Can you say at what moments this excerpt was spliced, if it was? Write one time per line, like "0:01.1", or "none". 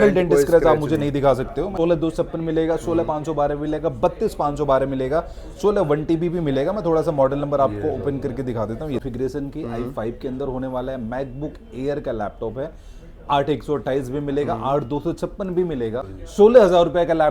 0:01.7
0:09.0
0:16.2